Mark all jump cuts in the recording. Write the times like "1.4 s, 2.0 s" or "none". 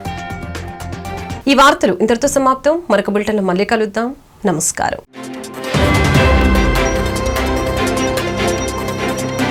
none